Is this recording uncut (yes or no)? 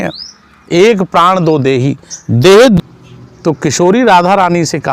no